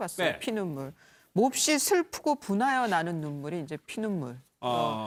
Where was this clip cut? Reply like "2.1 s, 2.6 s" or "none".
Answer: none